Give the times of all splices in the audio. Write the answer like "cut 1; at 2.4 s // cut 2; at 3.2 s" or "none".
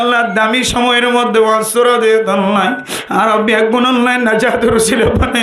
none